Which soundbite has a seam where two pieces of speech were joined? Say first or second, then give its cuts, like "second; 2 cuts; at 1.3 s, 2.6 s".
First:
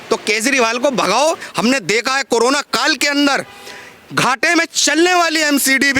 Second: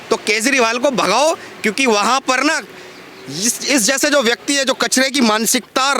first; 1 cut; at 1.5 s